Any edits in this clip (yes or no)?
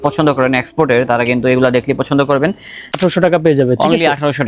yes